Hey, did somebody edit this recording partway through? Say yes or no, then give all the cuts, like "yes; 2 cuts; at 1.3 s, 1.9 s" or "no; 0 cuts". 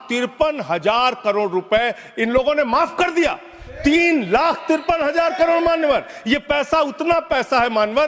no; 0 cuts